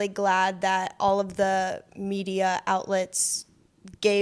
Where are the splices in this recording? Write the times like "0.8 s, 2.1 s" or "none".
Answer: none